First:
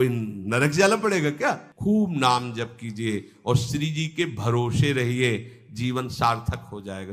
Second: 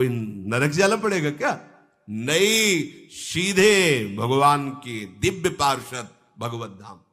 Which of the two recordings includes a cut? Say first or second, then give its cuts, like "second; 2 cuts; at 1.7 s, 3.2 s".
first; 1 cut; at 1.7 s